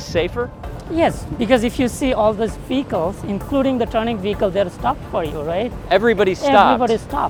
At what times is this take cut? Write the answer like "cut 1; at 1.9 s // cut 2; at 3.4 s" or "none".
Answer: none